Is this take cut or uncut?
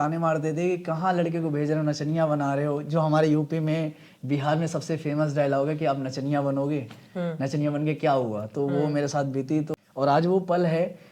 cut